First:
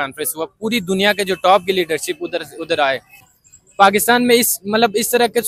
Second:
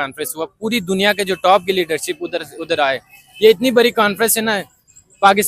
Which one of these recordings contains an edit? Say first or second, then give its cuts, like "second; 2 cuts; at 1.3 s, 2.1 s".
first; 1 cut; at 3.3 s